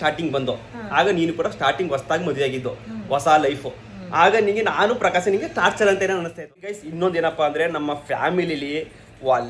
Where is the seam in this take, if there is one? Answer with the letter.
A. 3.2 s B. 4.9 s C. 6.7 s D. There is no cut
C